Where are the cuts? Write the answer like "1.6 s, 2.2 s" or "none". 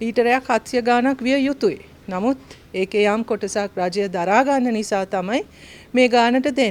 none